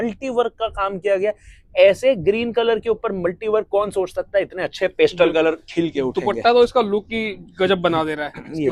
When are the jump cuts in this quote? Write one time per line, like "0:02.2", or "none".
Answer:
none